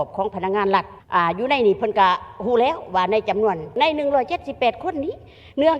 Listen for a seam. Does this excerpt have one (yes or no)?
yes